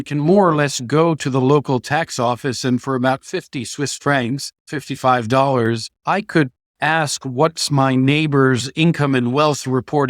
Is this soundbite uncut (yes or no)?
no